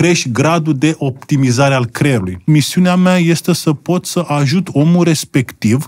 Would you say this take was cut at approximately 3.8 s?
no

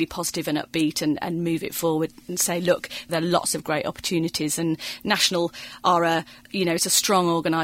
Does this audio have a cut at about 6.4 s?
yes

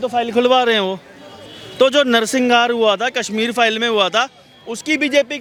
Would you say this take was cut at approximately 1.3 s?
no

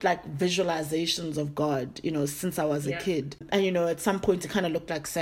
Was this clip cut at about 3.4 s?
yes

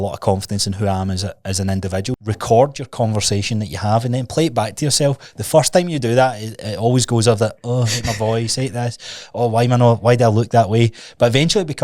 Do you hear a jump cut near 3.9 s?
no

